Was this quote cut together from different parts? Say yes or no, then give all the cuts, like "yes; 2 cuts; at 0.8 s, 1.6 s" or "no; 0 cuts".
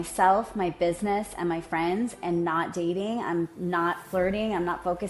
no; 0 cuts